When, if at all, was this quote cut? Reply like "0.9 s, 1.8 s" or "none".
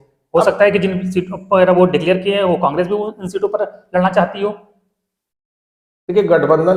none

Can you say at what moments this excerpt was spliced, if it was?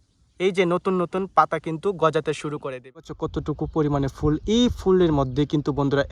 3.2 s

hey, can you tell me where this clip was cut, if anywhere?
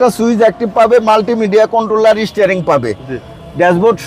none

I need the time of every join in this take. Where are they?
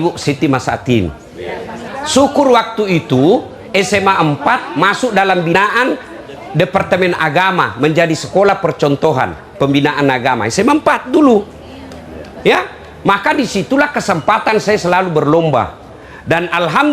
1.8 s, 5.5 s

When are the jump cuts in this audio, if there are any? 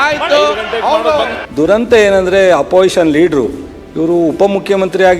1.4 s

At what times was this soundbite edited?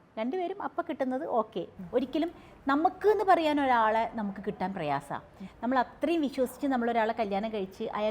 1.8 s

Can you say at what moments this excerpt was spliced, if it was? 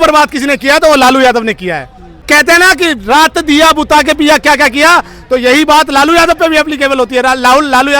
2.3 s

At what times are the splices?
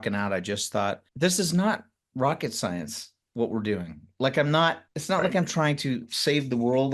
1.1 s, 4.8 s

